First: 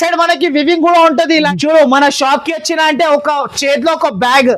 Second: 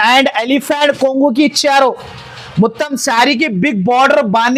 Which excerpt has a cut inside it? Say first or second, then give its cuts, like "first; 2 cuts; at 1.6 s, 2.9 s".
first; 1 cut; at 1.5 s